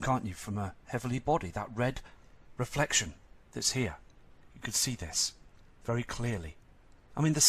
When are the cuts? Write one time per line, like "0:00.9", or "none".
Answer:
0:06.1